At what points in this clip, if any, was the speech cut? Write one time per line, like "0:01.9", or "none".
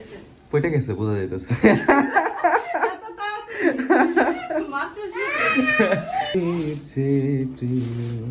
0:06.3

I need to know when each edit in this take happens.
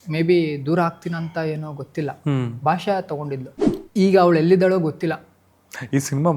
0:03.5

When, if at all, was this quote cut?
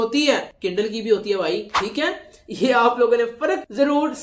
none

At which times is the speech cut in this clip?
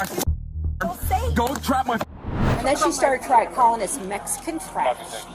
0:02.3

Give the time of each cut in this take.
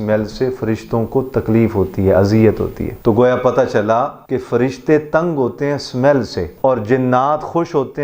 0:02.8
0:04.2
0:06.4

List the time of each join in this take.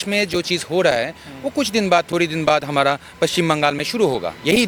none

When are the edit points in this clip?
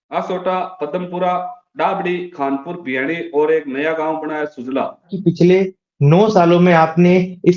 0:05.1

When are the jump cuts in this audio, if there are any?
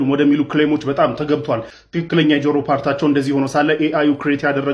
0:01.8

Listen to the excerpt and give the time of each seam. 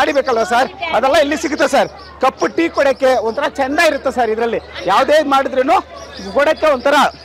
none

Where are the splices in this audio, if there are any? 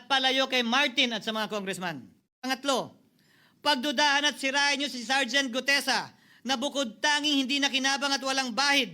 0:02.2

